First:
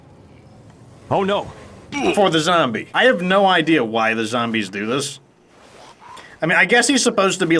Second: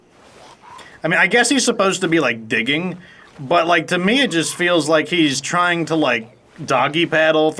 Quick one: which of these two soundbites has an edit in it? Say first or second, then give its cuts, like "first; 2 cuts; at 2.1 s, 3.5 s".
first; 1 cut; at 2.8 s